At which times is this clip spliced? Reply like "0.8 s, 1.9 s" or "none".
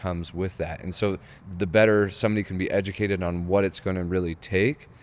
1.3 s